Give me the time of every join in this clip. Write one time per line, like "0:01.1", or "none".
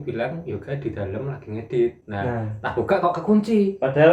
0:02.0